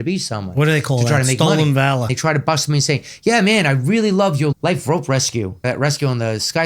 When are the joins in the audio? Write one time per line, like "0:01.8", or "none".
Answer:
0:02.1
0:04.5
0:05.6